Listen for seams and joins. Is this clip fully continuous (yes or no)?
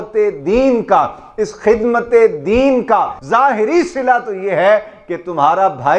no